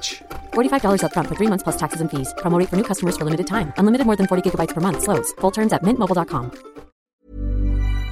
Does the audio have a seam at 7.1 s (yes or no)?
yes